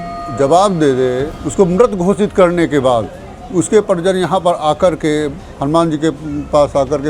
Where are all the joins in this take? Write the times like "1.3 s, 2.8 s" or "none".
1.4 s